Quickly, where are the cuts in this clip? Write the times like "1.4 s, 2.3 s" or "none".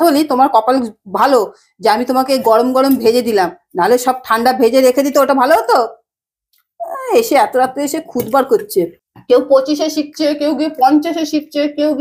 9.0 s